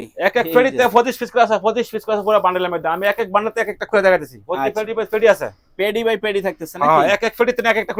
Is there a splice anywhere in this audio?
no; 0 cuts

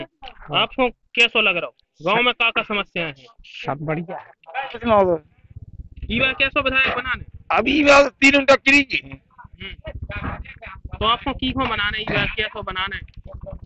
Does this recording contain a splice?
yes; 1 cut; at 4.8 s

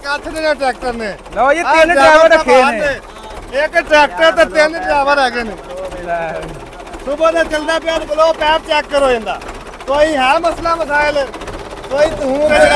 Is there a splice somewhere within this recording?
no; 0 cuts

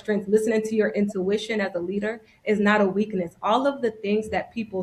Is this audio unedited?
yes; 0 cuts

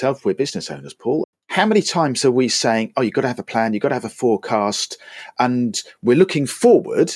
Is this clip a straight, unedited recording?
no; 1 cut; at 1.2 s

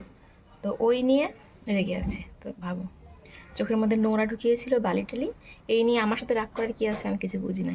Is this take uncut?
yes; 0 cuts

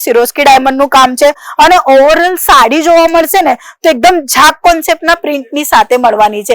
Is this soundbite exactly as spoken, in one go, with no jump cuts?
yes; 0 cuts

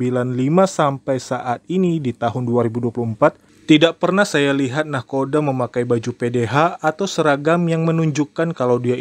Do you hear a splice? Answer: no; 0 cuts

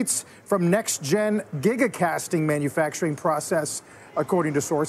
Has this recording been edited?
no; 0 cuts

